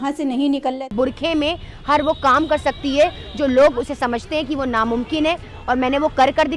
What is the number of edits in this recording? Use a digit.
1